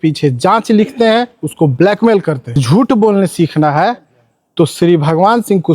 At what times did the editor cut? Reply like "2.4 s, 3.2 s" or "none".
2.6 s